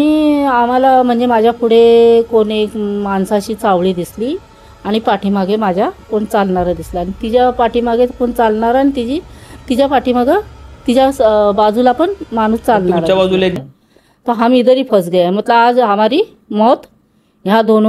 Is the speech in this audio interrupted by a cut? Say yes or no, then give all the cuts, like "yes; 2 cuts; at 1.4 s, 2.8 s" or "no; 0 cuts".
yes; 1 cut; at 13.6 s